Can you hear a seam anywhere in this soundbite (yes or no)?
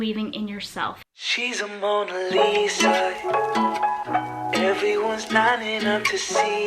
yes